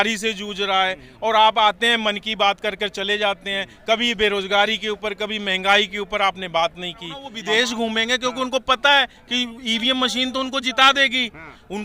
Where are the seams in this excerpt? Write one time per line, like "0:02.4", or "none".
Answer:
0:07.3